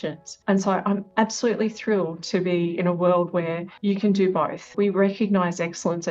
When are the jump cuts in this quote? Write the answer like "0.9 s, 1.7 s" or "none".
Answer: 3.7 s, 4.7 s